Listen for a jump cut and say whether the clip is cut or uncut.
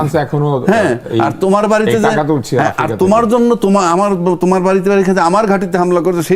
uncut